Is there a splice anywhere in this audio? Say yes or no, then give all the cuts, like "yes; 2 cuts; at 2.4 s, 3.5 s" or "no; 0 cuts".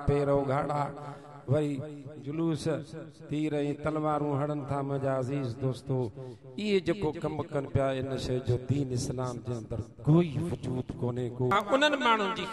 yes; 1 cut; at 11.5 s